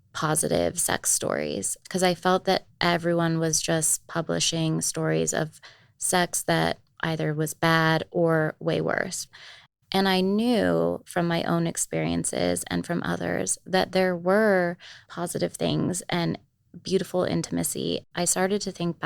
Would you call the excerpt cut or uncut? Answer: cut